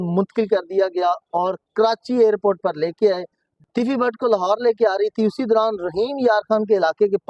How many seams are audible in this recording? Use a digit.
1